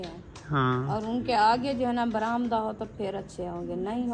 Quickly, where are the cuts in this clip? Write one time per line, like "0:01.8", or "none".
none